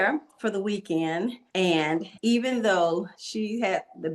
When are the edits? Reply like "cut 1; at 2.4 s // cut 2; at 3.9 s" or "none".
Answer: cut 1; at 1.8 s // cut 2; at 3.2 s